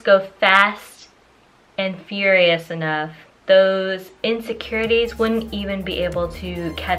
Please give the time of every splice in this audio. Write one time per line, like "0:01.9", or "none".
none